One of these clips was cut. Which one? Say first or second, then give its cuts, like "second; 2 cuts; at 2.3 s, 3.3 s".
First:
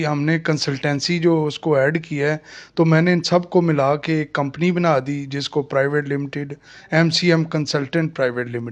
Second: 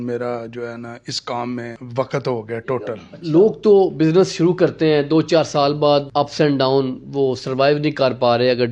second; 2 cuts; at 1.8 s, 3.1 s